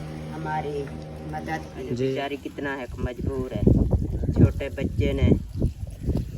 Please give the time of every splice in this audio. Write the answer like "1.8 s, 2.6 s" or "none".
2.1 s